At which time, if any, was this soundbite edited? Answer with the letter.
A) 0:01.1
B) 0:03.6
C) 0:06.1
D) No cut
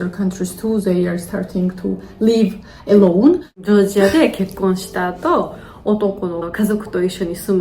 B